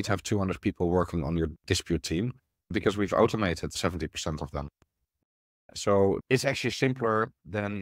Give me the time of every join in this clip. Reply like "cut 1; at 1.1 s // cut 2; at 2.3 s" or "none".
cut 1; at 2.7 s // cut 2; at 3.8 s // cut 3; at 6.2 s